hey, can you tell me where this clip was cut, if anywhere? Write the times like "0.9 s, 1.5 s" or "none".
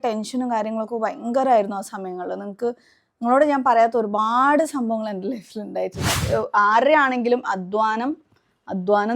6.3 s